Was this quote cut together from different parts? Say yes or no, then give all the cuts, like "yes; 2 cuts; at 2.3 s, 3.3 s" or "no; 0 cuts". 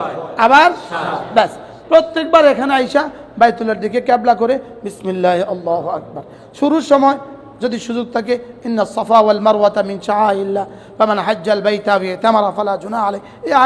no; 0 cuts